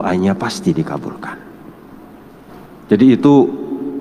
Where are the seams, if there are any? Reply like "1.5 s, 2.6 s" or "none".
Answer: 2.7 s